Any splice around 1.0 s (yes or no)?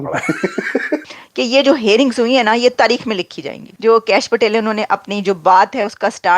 yes